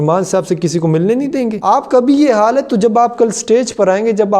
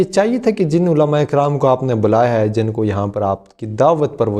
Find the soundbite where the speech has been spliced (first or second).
first